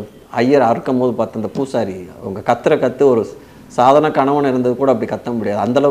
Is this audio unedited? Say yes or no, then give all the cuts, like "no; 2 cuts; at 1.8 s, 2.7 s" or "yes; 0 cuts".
yes; 0 cuts